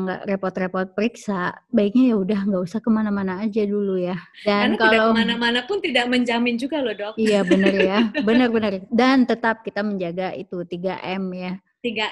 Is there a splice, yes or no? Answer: yes